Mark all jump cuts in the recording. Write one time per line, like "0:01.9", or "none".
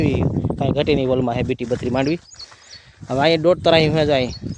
none